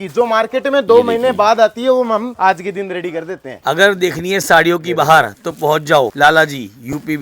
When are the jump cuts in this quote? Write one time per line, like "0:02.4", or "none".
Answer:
0:02.3
0:03.6
0:06.1

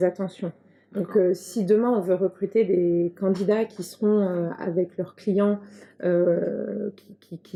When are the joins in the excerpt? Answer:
none

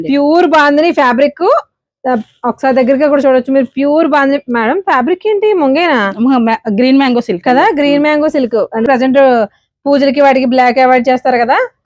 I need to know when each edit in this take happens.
0:08.9

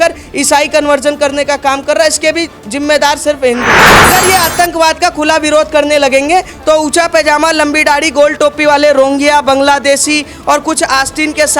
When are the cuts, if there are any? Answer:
0:04.1

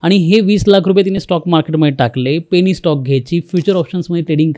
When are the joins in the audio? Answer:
none

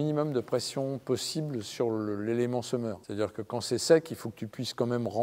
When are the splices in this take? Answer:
0:03.0

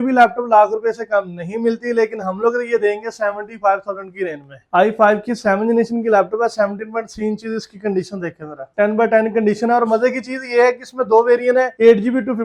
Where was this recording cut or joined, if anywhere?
0:04.6
0:08.7

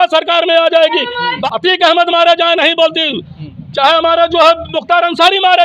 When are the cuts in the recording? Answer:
0:01.3

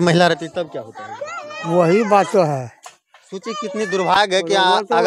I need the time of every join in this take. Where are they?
none

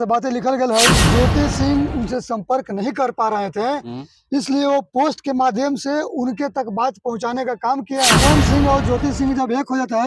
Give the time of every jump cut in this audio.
0:01.0
0:08.2

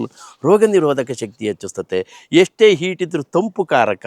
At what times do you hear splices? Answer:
none

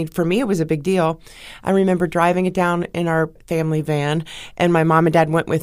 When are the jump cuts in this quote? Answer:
0:03.4

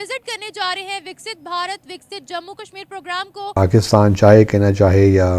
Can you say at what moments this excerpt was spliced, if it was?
0:03.6

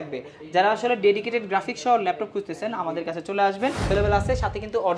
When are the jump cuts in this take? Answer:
0:03.9

